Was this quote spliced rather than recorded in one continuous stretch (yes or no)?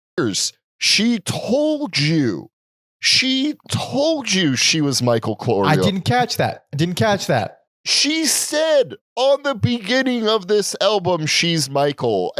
no